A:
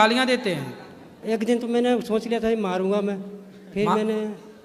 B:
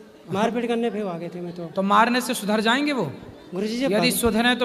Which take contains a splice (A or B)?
A